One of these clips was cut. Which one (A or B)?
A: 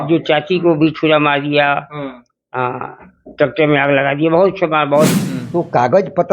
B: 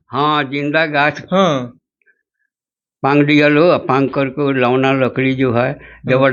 A